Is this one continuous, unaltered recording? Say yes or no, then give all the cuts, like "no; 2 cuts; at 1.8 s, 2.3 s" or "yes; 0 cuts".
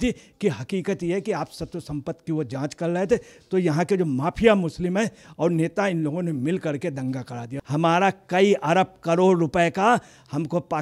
no; 1 cut; at 7.6 s